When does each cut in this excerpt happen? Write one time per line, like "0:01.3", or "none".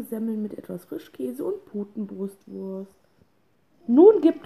0:02.1